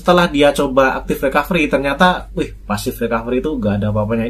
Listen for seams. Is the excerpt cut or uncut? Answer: uncut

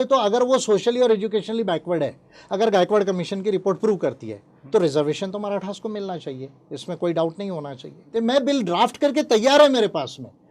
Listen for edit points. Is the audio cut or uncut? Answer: cut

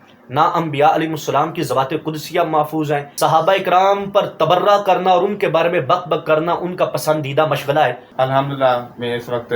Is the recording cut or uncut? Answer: cut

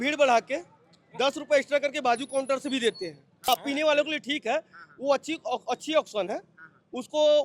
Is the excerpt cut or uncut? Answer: cut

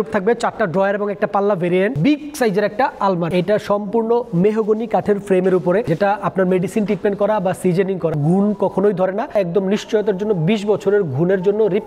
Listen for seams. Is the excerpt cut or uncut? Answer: cut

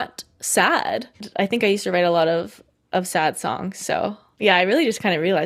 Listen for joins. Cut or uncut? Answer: cut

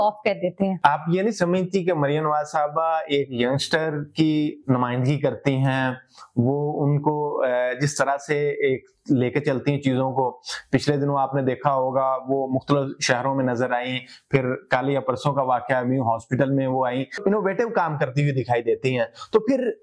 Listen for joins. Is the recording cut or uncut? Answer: uncut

